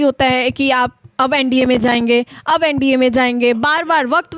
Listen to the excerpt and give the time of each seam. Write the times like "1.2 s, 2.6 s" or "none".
none